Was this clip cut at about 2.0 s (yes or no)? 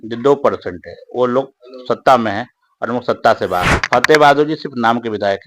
no